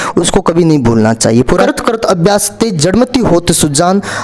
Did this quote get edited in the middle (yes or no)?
yes